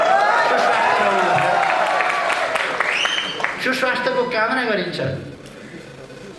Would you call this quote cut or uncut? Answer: uncut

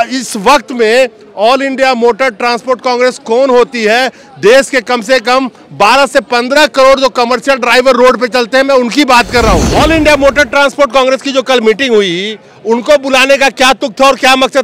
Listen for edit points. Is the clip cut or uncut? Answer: cut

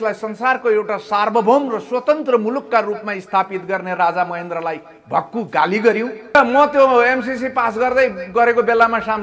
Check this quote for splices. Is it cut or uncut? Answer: cut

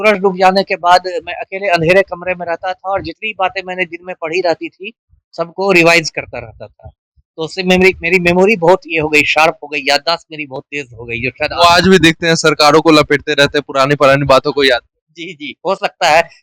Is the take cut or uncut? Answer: uncut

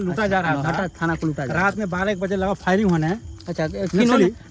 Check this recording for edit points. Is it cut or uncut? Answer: uncut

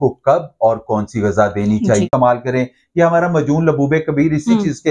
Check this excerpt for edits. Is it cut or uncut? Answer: cut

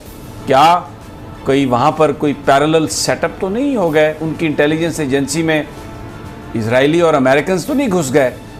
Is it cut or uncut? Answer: uncut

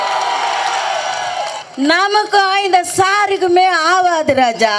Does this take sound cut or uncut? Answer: cut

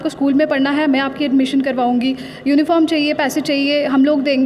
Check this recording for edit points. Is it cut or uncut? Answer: uncut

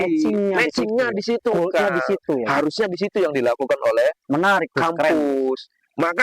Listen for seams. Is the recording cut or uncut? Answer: uncut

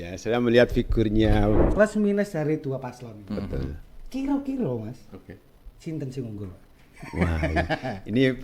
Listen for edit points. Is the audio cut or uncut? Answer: cut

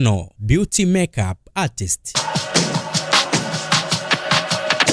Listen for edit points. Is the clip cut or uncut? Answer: cut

